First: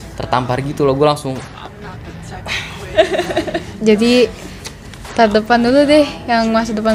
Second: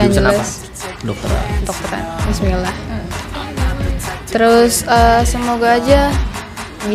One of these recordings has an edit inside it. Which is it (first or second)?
first